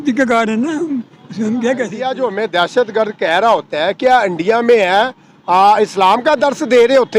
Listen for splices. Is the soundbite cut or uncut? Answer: cut